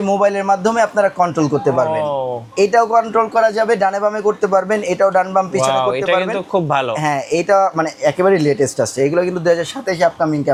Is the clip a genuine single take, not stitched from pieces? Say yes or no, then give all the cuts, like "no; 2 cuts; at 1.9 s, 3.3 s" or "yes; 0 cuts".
yes; 0 cuts